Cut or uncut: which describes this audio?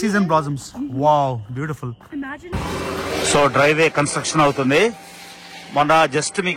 cut